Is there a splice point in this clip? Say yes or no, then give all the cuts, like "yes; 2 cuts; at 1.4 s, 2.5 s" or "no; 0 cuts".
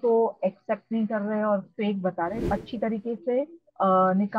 yes; 1 cut; at 2.4 s